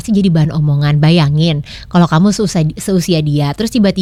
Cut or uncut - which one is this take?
uncut